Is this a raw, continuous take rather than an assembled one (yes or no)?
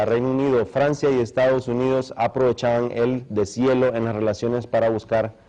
yes